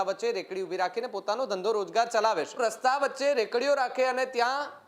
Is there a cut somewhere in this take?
yes; 1 cut; at 2.6 s

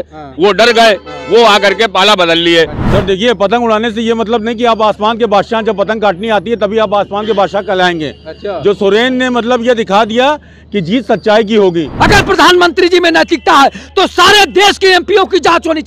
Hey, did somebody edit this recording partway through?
yes; 2 cuts; at 2.8 s, 11.9 s

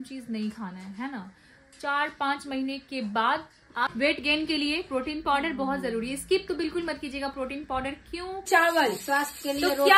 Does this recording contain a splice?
yes; 2 cuts; at 3.9 s, 8.5 s

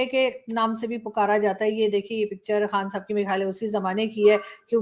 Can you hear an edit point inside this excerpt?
no; 0 cuts

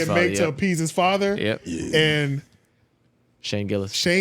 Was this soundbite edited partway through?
no; 0 cuts

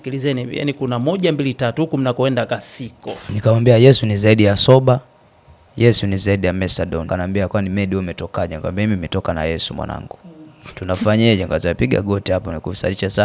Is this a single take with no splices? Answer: no; 2 cuts; at 3.3 s, 7.0 s

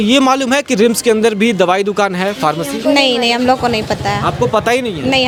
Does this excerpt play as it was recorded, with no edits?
yes; 0 cuts

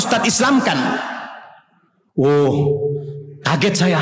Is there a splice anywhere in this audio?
no; 0 cuts

